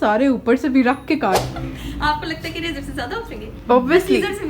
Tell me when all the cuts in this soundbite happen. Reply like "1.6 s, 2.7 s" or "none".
1.4 s